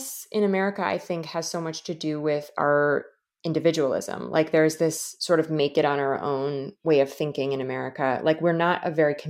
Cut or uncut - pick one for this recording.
uncut